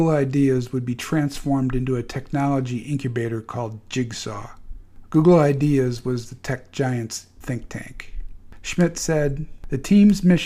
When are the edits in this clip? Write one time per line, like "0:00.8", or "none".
0:06.1